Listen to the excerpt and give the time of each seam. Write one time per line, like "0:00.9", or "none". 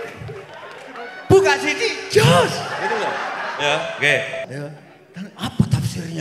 0:04.5